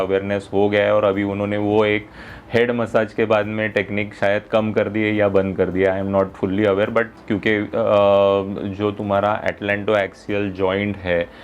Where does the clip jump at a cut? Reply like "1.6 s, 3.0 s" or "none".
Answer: 7.2 s